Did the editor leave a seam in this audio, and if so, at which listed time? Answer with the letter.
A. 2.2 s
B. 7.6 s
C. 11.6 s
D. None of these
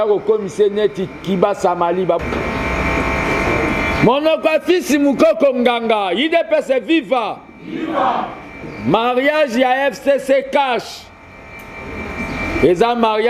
A